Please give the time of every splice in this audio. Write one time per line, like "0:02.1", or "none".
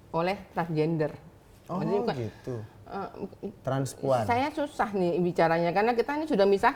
none